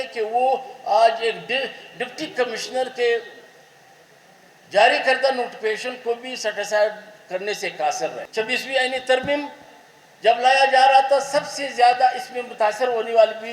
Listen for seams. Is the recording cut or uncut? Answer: cut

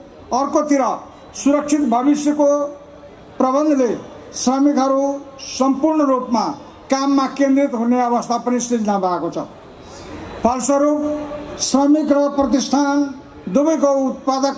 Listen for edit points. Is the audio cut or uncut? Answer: uncut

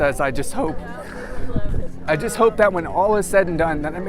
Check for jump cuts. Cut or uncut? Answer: cut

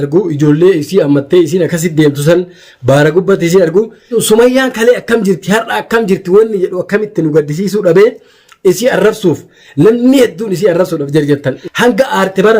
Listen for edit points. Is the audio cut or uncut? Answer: cut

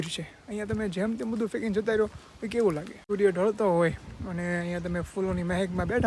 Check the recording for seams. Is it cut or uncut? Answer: cut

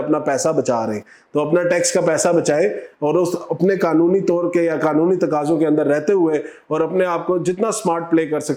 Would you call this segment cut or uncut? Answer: uncut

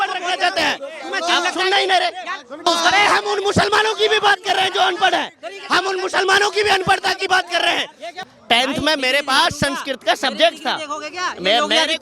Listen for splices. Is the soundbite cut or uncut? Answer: cut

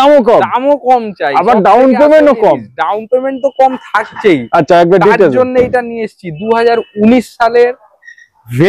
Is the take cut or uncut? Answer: uncut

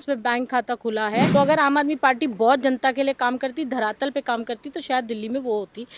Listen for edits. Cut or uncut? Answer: cut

